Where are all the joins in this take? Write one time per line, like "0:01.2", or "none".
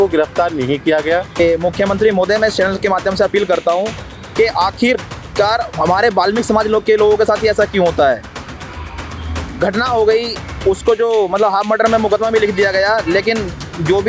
0:01.4